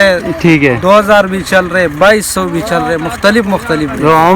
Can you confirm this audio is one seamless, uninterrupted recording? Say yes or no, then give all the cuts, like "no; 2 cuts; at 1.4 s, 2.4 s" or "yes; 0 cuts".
yes; 0 cuts